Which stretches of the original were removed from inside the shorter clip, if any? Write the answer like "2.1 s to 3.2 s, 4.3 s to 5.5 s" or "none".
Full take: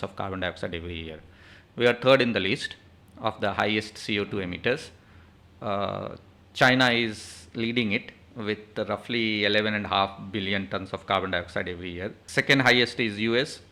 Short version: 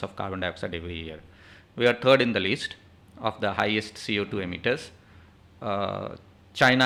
none